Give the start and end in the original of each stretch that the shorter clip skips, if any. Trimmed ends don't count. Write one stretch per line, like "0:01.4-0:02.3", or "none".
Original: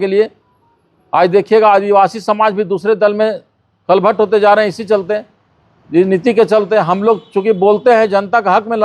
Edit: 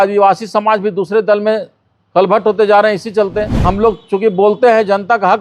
0:05.4-0:06.9